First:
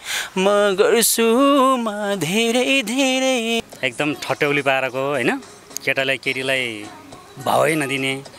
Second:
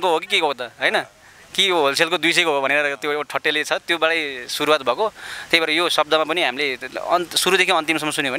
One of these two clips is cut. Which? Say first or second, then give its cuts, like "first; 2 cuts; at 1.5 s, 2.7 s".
first; 1 cut; at 3.6 s